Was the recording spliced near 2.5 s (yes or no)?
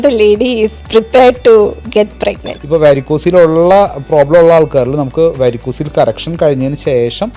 yes